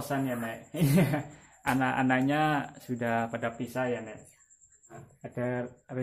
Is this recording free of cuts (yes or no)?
no